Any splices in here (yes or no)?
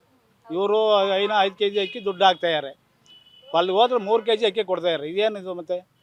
no